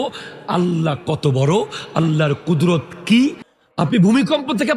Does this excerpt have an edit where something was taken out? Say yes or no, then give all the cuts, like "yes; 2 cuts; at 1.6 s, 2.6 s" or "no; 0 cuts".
yes; 1 cut; at 3.5 s